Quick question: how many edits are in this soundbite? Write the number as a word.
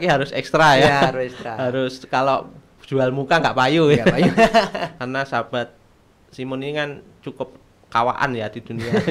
one